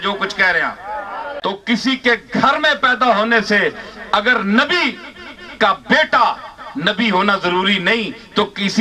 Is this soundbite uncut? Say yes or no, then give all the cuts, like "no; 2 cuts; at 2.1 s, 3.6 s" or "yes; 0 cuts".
no; 1 cut; at 1.2 s